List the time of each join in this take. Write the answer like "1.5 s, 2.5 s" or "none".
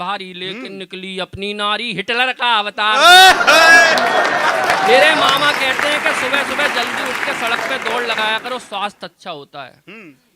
none